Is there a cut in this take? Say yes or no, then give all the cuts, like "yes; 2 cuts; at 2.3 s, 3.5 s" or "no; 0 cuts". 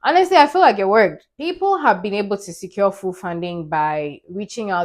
yes; 1 cut; at 1.3 s